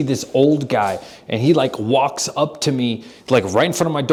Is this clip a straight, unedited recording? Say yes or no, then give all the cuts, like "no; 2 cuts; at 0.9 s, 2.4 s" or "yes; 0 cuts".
yes; 0 cuts